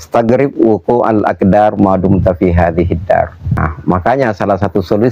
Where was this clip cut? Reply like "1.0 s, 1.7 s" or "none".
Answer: 3.6 s